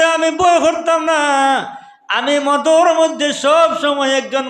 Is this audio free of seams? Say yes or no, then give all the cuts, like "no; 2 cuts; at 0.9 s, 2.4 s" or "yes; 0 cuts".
yes; 0 cuts